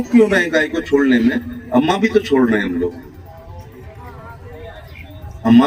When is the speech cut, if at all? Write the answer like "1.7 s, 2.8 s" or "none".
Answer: none